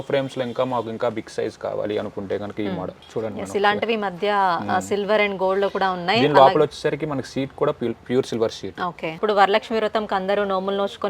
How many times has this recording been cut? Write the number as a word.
one